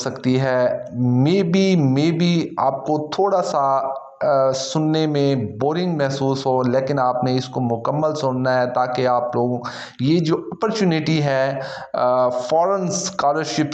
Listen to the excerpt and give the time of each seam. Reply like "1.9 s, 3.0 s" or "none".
1.2 s